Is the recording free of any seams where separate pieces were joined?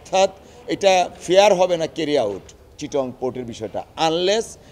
yes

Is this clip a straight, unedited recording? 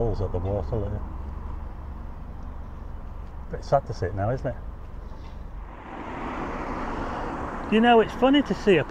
yes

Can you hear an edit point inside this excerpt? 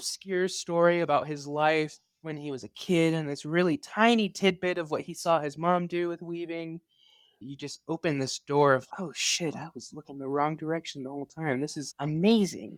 no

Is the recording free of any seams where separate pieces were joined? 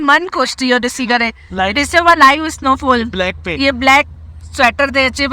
yes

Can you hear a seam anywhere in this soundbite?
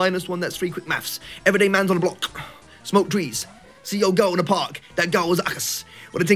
no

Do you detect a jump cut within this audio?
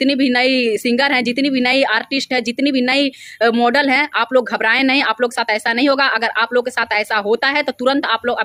no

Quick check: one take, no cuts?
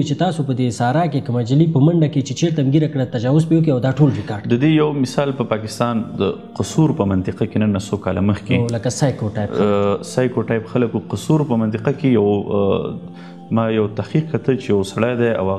yes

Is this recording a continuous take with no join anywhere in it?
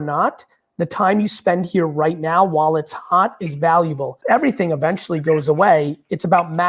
no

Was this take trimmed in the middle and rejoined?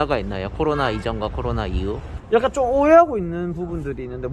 no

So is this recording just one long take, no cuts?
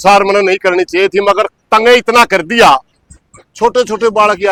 yes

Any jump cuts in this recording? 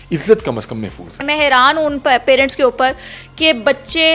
yes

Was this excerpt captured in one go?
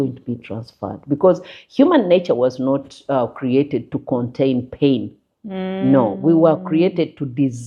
yes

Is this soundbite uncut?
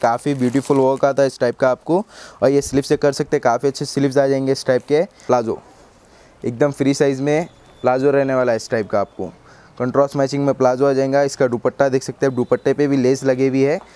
yes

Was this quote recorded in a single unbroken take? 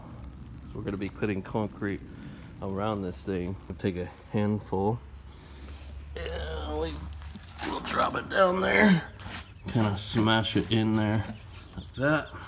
no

